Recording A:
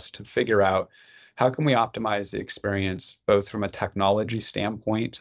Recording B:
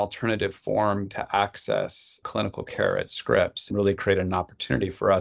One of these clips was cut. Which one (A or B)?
B